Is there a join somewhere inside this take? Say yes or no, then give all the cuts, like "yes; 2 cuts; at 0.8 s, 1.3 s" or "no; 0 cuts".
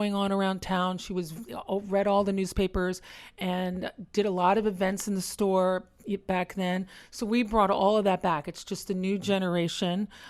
no; 0 cuts